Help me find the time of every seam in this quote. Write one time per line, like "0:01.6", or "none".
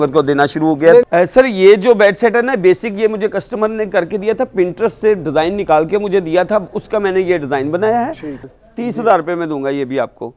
0:01.0
0:08.5